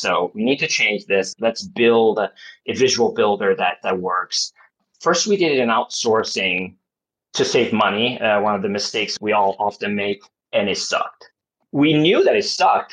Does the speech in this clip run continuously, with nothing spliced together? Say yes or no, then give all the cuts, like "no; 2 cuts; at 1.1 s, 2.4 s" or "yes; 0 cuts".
yes; 0 cuts